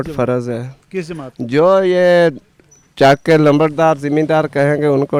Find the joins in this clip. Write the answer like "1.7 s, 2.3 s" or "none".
none